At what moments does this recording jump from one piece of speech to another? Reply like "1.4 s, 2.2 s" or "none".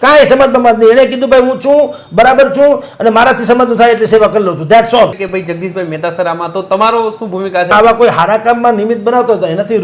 5.3 s, 7.7 s